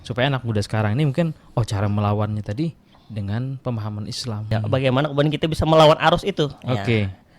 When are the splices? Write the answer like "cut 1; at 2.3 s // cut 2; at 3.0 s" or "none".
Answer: cut 1; at 4.5 s